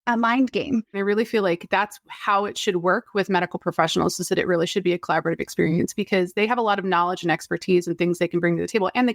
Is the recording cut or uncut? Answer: cut